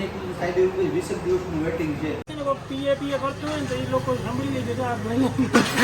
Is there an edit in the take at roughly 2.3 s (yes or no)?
yes